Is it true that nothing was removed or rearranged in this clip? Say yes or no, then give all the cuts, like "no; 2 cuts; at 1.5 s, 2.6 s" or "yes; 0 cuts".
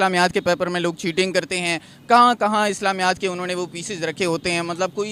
yes; 0 cuts